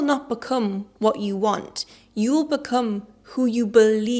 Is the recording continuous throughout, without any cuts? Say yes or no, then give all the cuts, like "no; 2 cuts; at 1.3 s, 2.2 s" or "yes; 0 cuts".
yes; 0 cuts